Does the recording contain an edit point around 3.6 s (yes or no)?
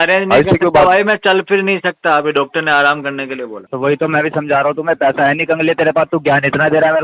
yes